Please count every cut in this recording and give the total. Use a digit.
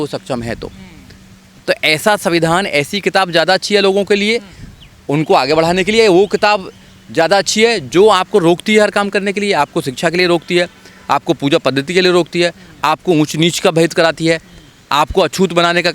1